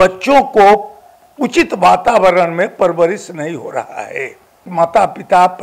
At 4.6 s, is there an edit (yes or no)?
yes